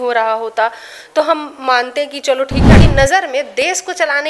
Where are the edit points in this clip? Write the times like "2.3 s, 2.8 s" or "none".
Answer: 2.8 s